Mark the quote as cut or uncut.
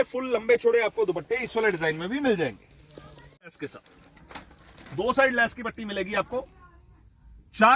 cut